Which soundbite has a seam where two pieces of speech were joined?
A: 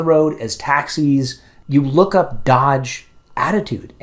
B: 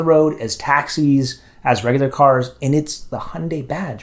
A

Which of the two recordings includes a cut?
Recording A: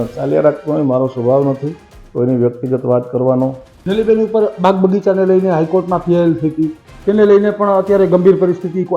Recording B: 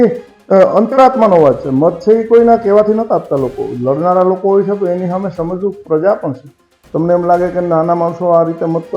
A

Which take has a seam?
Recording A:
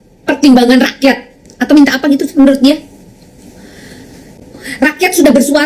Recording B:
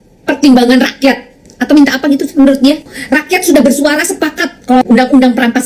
B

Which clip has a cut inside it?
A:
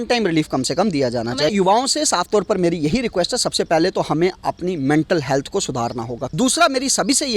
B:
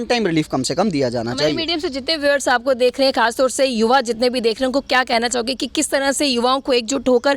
A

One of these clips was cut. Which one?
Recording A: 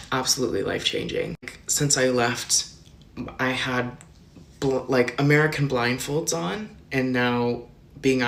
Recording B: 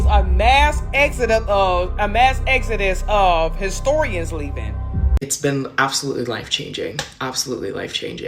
B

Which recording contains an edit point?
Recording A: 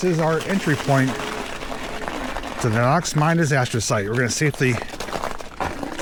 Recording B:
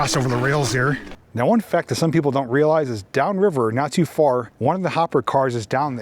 B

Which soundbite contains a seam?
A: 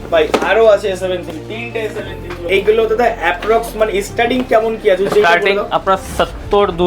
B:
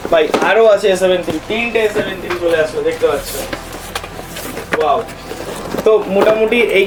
A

